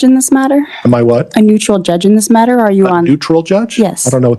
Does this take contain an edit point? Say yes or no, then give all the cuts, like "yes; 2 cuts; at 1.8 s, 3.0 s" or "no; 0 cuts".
no; 0 cuts